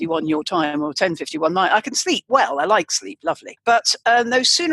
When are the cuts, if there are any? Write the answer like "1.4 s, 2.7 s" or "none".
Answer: 3.5 s